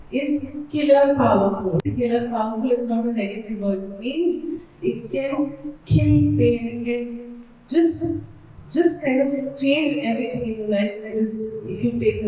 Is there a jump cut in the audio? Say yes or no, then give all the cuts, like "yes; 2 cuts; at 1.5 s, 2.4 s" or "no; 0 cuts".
yes; 1 cut; at 1.8 s